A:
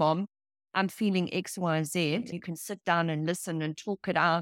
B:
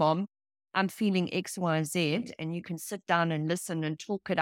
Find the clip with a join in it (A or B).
A